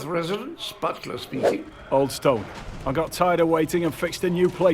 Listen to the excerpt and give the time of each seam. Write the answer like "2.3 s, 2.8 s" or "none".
3.0 s